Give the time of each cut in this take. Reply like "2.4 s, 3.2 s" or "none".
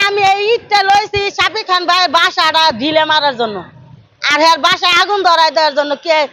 none